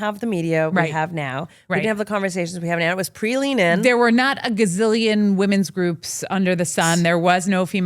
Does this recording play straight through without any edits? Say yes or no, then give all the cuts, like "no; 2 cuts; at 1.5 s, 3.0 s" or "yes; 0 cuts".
yes; 0 cuts